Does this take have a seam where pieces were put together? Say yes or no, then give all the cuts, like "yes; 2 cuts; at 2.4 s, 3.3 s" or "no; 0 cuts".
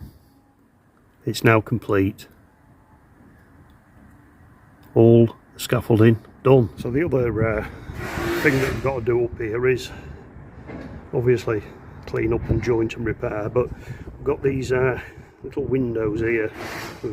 yes; 1 cut; at 6.8 s